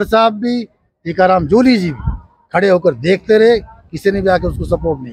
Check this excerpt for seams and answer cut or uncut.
uncut